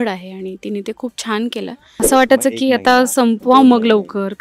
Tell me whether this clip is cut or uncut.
cut